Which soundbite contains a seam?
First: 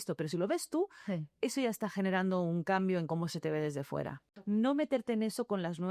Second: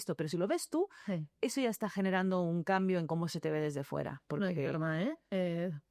first; 1 cut; at 4.2 s

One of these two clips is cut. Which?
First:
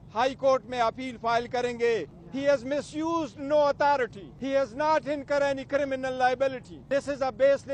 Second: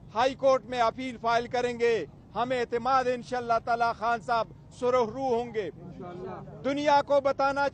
first; 3 cuts; at 2.2 s, 4.3 s, 6.7 s

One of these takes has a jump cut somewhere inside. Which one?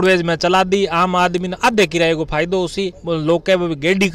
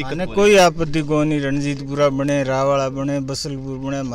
first; 1 cut; at 3.0 s

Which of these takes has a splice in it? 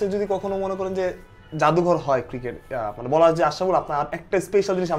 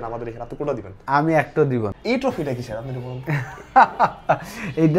second; 1 cut; at 1.9 s

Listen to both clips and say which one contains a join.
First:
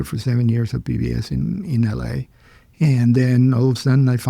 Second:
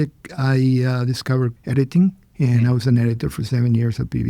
second; 2 cuts; at 1.6 s, 2.3 s

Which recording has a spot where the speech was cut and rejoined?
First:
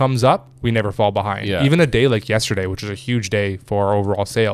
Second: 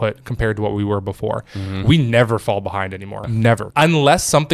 second; 1 cut; at 3.5 s

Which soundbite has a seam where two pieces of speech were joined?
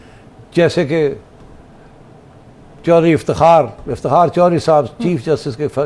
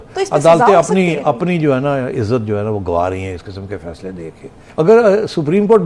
second; 1 cut; at 4.6 s

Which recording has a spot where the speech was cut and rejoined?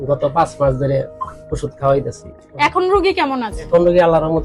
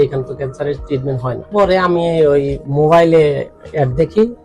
second; 1 cut; at 1.5 s

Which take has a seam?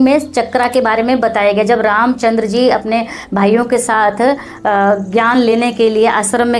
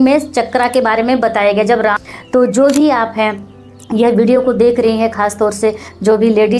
second; 1 cut; at 2.0 s

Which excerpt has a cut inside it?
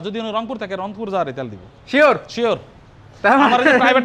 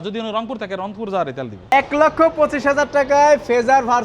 second; 1 cut; at 1.7 s

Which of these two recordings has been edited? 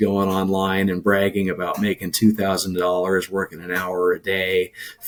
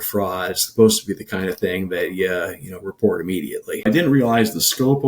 second; 1 cut; at 3.9 s

